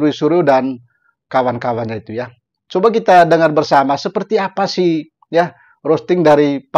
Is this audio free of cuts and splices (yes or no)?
yes